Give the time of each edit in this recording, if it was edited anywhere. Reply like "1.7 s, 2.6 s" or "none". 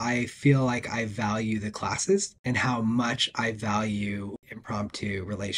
2.3 s, 4.5 s